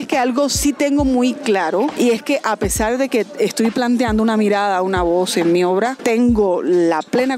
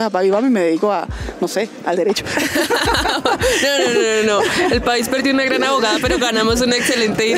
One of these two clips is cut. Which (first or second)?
first